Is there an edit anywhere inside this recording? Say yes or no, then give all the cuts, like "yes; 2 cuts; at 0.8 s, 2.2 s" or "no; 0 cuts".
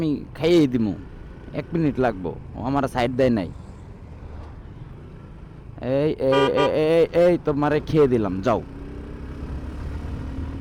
no; 0 cuts